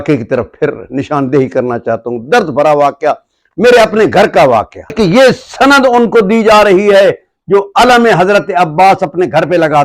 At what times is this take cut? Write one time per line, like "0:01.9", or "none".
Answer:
0:04.9